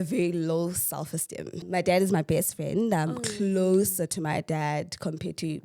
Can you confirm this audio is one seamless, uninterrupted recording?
no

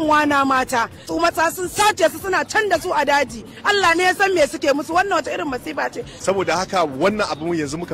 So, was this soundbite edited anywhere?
yes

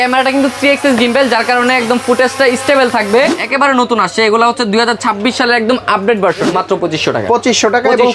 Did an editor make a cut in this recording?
yes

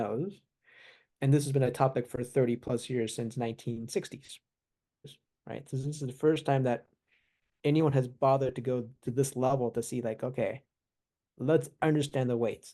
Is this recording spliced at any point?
yes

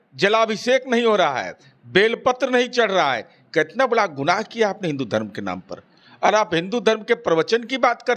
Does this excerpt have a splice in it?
no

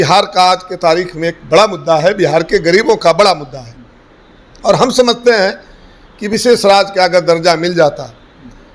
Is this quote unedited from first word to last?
yes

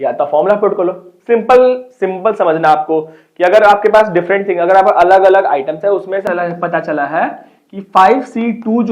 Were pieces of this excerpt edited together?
yes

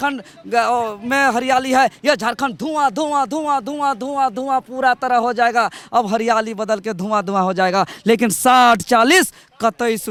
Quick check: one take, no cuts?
yes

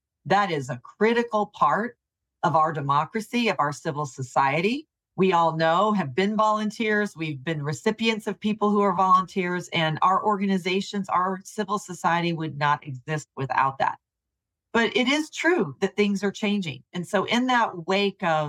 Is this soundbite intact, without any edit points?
no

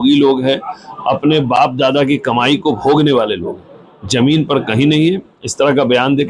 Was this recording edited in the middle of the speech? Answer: no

